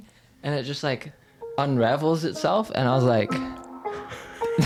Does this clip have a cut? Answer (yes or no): no